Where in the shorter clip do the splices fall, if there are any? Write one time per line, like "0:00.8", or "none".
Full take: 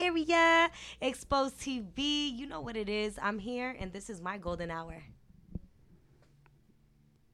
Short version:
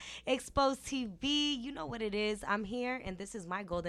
none